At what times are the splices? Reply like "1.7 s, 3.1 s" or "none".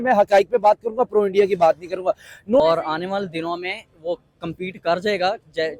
2.6 s